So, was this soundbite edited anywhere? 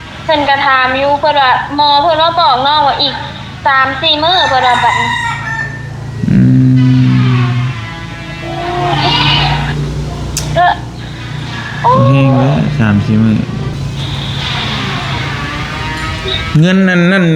yes; 1 cut; at 13.7 s

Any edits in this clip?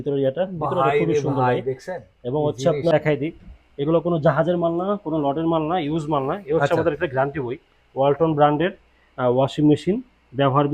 yes; 1 cut; at 2.9 s

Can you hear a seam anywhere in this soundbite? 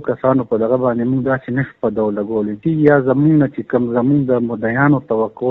yes; 1 cut; at 2.6 s

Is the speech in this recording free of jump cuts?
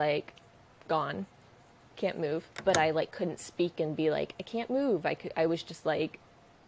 no; 1 cut; at 2.5 s

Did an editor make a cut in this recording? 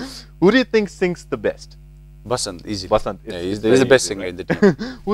yes; 1 cut; at 2.0 s

